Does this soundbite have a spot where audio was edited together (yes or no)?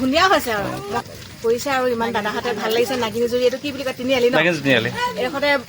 yes